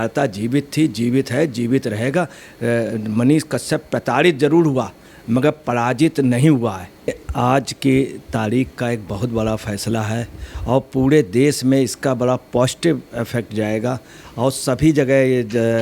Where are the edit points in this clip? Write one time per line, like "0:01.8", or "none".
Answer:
0:07.2